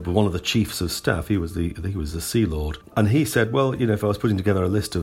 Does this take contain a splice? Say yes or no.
yes